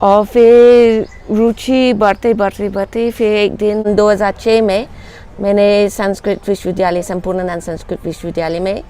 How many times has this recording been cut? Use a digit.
1